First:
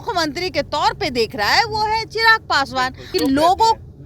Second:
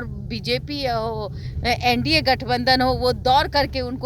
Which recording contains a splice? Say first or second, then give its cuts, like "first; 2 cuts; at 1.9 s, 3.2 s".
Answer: first; 1 cut; at 3.0 s